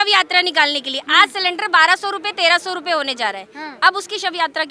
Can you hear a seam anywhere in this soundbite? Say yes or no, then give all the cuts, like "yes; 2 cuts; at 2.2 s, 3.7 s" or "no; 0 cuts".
no; 0 cuts